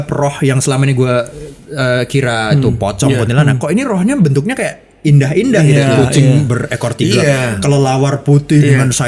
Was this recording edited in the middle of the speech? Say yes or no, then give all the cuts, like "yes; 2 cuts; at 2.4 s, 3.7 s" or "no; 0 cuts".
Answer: no; 0 cuts